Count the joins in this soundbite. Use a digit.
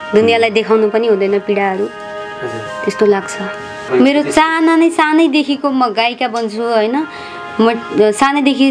1